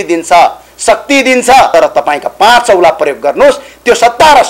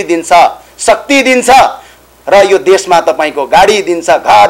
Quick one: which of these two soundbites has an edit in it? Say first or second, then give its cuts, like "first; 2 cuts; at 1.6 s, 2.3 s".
first; 1 cut; at 1.7 s